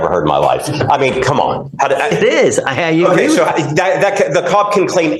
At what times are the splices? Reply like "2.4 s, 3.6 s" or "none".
none